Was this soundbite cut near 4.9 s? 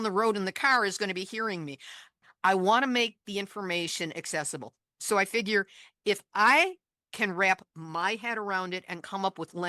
no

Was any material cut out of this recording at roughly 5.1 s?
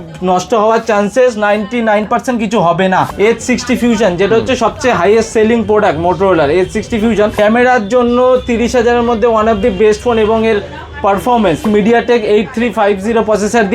no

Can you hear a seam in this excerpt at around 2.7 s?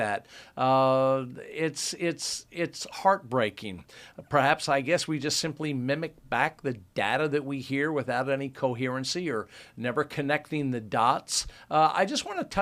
yes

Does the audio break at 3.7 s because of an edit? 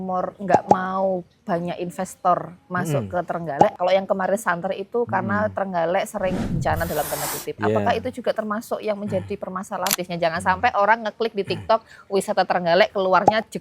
yes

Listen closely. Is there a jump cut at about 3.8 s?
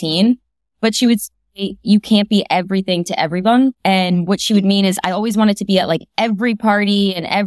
yes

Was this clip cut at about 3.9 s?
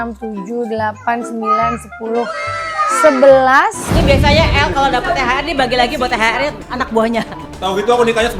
yes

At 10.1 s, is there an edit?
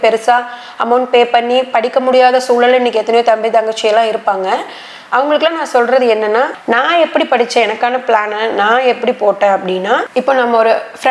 yes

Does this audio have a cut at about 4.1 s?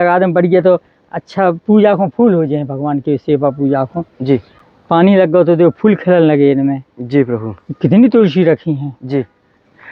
no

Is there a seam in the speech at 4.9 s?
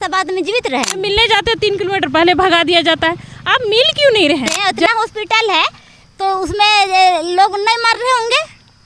yes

